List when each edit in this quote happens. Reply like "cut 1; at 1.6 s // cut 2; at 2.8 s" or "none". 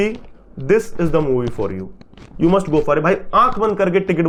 none